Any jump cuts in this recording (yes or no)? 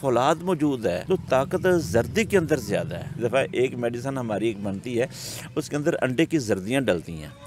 yes